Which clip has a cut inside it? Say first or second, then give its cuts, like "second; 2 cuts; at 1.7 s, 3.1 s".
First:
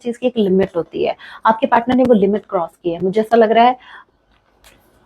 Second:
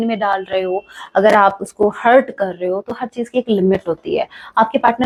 first; 1 cut; at 3.9 s